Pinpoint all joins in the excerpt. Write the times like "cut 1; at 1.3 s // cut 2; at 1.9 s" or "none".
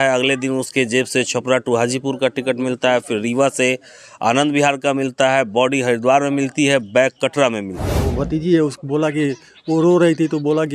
cut 1; at 8.0 s